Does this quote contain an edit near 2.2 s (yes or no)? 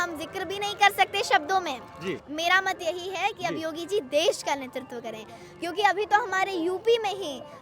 yes